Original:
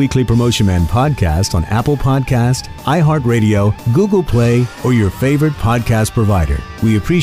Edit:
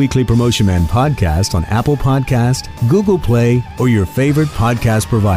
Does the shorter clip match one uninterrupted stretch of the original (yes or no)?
no